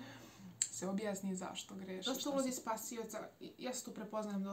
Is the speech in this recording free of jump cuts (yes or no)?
no